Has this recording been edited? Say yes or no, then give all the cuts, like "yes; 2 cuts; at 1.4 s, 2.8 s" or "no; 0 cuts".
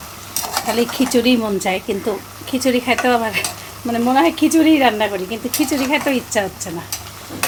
no; 0 cuts